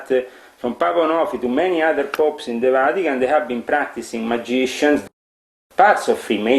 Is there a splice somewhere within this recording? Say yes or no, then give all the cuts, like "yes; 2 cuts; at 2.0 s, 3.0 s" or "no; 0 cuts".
yes; 1 cut; at 5.2 s